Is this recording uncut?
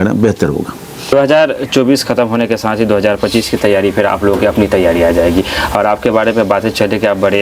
no; 1 cut; at 1.1 s

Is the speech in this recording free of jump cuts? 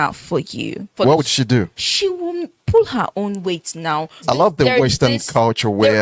no; 3 cuts; at 0.9 s, 1.8 s, 4.2 s

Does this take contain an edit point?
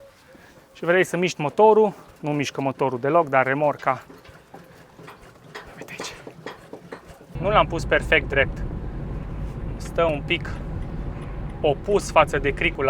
yes; 1 cut; at 7.3 s

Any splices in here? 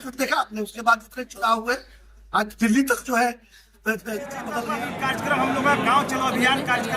yes; 1 cut; at 4.7 s

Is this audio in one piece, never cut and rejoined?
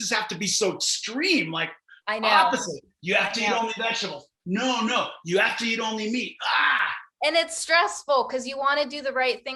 yes; 0 cuts

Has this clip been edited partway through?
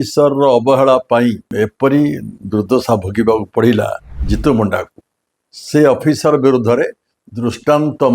yes; 1 cut; at 1.5 s

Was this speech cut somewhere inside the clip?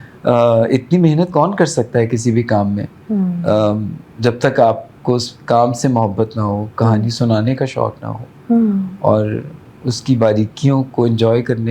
no; 0 cuts

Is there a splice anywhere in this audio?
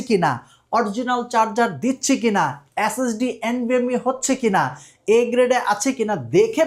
no; 0 cuts

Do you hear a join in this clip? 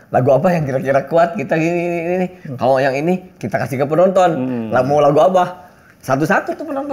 no; 0 cuts

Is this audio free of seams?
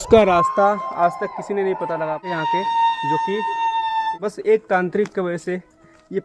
no; 2 cuts; at 2.2 s, 4.1 s

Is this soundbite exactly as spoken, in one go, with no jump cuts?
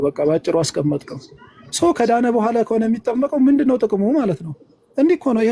yes; 0 cuts

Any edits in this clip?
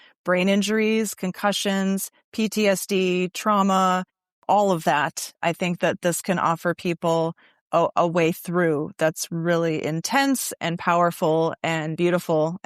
yes; 1 cut; at 4.4 s

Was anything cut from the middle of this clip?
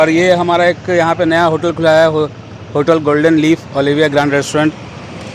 no; 0 cuts

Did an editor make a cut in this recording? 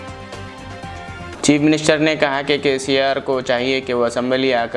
yes; 1 cut; at 1.3 s

